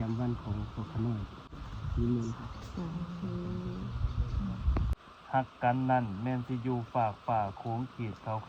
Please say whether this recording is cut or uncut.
cut